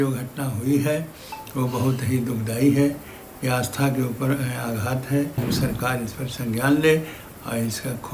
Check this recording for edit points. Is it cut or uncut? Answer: cut